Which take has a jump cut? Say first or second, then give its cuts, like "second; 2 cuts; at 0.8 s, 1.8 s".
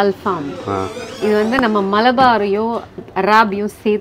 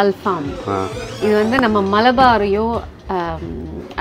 first; 1 cut; at 3.0 s